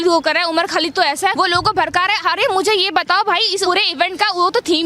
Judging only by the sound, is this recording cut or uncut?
cut